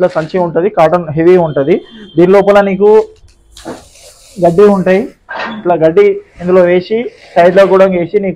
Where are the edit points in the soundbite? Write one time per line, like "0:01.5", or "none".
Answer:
none